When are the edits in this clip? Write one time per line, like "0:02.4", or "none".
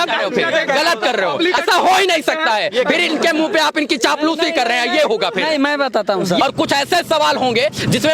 0:01.6
0:06.4